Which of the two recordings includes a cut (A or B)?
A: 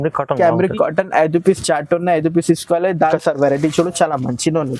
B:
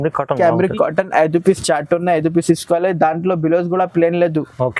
A